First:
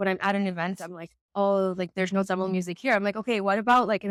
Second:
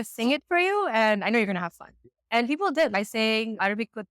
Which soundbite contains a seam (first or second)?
second